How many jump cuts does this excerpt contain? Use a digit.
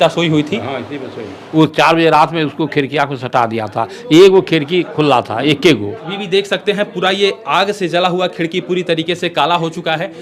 2